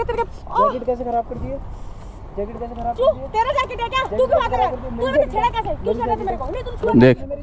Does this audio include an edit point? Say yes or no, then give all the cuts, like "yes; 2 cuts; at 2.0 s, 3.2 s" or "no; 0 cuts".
no; 0 cuts